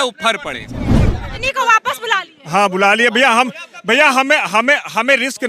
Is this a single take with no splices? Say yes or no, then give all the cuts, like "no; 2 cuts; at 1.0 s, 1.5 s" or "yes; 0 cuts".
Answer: no; 1 cut; at 1.2 s